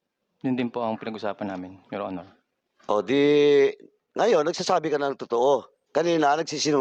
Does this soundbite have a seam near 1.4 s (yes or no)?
no